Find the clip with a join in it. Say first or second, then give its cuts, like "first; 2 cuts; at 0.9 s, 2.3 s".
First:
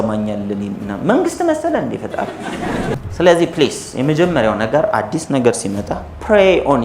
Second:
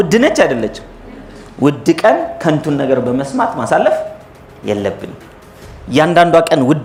first; 1 cut; at 3.0 s